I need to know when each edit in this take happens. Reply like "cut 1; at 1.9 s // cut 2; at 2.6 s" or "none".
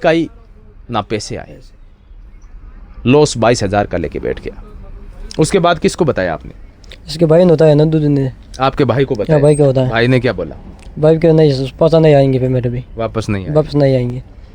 none

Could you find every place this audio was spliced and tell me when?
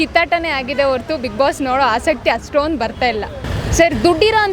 cut 1; at 3.4 s

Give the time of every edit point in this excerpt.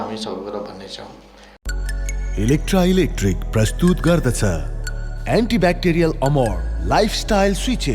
cut 1; at 1.5 s

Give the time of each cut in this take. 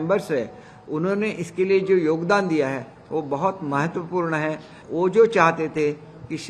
cut 1; at 4.8 s

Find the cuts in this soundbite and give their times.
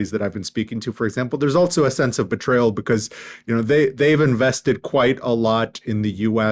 none

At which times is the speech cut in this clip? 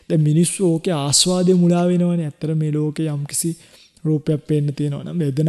none

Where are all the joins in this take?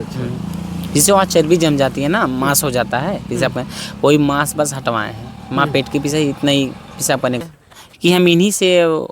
cut 1; at 7.4 s

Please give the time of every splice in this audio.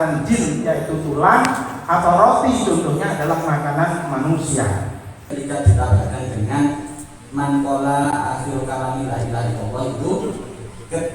cut 1; at 5.3 s

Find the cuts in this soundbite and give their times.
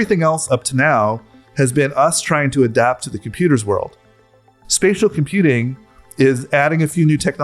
cut 1; at 4.3 s

